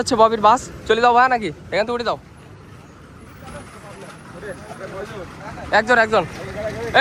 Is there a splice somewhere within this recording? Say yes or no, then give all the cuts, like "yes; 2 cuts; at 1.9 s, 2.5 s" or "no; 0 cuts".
no; 0 cuts